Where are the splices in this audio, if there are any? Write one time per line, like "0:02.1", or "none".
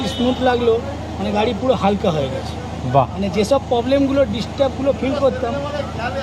none